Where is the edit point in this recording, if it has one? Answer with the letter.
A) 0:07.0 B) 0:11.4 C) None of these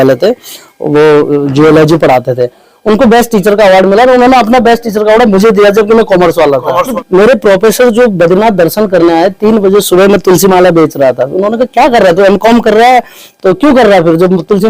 A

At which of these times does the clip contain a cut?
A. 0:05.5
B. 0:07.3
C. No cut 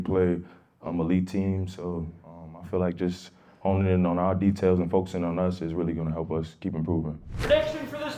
B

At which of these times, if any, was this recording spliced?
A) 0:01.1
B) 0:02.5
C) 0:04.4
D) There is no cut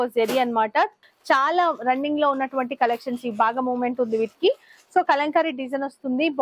A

